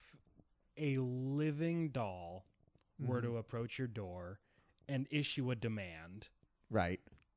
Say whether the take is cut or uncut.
uncut